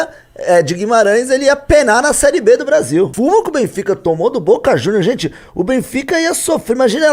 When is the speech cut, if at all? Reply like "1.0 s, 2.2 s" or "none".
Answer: 3.1 s

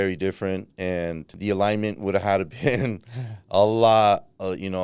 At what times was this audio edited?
1.3 s

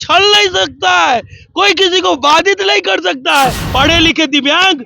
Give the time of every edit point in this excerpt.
3.6 s

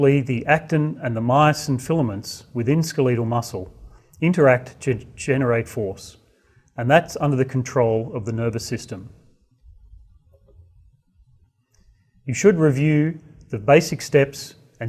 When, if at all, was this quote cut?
2.2 s

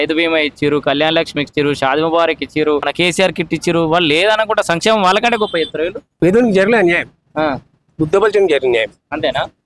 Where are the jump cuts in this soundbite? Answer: 2.9 s, 6.0 s

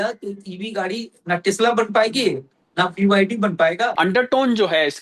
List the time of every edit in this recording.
3.9 s

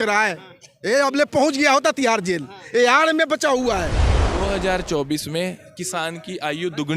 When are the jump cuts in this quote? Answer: 4.3 s

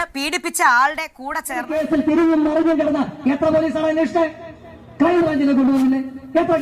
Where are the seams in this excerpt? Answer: 1.7 s

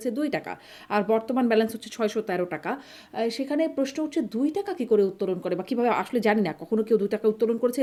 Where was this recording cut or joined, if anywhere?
none

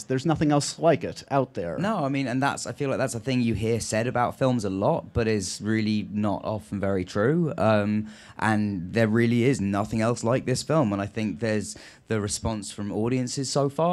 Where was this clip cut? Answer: 1.5 s

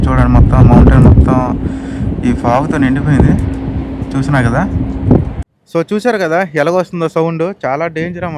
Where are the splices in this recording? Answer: 5.5 s

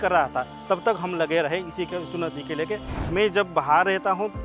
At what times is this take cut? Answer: 2.9 s

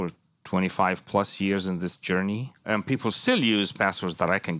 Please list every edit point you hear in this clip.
2.7 s

